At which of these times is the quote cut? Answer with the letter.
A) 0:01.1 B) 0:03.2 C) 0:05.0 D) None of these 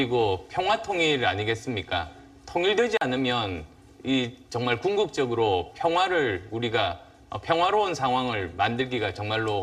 B